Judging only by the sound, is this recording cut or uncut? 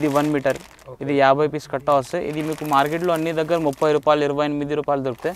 uncut